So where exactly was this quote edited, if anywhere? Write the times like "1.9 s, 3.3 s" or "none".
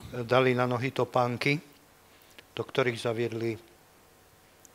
none

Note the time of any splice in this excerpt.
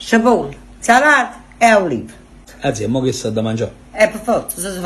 2.5 s

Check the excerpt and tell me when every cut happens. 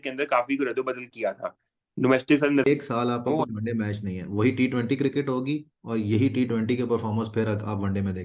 2.7 s

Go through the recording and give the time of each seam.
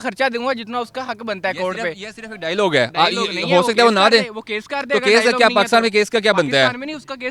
none

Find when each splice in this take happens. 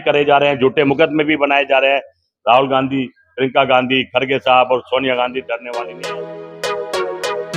5.9 s

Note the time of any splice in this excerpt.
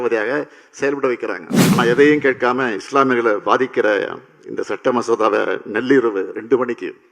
1.5 s

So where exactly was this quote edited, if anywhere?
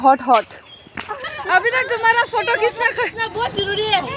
1.2 s

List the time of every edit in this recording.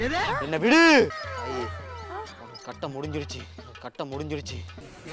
1.2 s

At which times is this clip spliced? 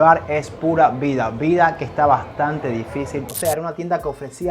3.3 s

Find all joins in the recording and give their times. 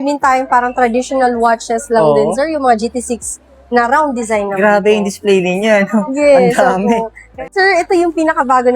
7.4 s

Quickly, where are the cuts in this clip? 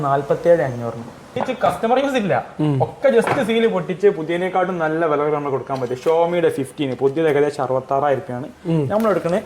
1.4 s

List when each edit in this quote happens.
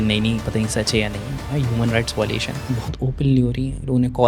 2.8 s

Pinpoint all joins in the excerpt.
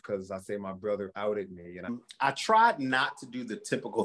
1.9 s

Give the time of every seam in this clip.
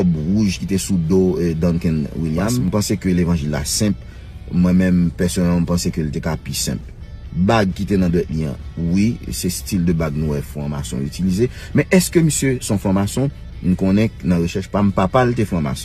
2.6 s

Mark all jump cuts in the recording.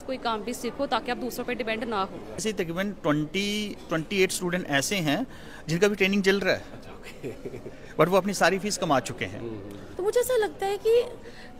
2.4 s, 9.8 s

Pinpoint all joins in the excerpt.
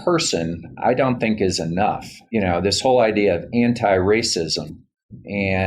2.1 s

